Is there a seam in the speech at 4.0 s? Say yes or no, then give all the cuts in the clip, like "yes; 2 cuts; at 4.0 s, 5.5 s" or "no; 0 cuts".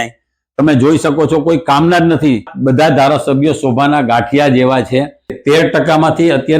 no; 2 cuts; at 2.5 s, 5.4 s